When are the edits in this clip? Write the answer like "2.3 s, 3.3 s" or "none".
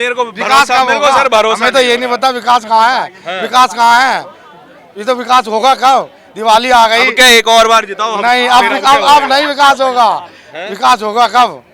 none